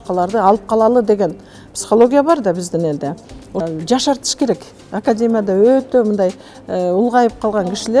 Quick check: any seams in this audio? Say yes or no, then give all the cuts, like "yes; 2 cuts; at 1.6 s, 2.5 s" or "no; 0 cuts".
yes; 1 cut; at 3.6 s